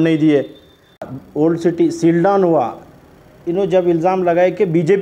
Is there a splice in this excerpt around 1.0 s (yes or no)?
yes